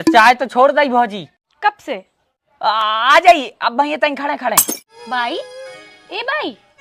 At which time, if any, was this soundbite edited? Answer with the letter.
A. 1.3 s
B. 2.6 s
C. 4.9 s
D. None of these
C